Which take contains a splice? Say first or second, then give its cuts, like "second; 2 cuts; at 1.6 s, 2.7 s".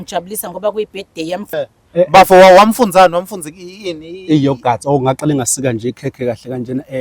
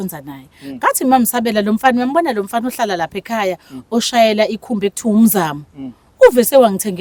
first; 1 cut; at 1.6 s